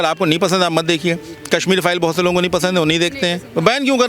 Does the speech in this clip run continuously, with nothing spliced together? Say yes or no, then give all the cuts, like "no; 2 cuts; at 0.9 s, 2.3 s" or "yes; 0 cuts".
yes; 0 cuts